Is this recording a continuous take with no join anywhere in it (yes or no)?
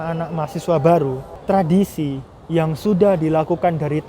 no